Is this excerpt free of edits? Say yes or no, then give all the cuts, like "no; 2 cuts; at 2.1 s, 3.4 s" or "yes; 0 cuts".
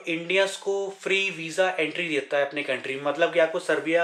yes; 0 cuts